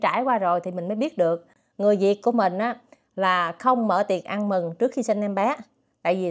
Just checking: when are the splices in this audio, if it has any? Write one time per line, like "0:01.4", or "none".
0:01.6